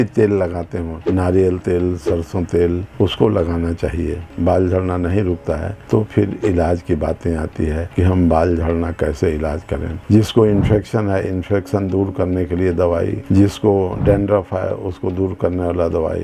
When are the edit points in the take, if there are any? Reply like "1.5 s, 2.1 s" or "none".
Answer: 4.2 s, 9.9 s